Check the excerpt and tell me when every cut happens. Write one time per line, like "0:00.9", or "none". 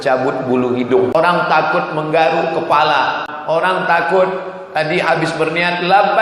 0:01.1
0:03.2